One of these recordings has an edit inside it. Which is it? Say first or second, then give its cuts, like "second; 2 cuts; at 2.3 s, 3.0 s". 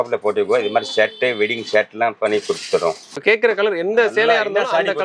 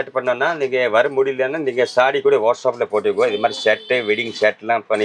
first; 1 cut; at 3.3 s